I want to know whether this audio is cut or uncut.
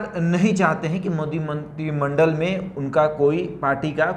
uncut